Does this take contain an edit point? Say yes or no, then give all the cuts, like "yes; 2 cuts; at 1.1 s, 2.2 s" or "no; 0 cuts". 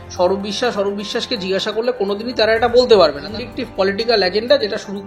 yes; 1 cut; at 3.3 s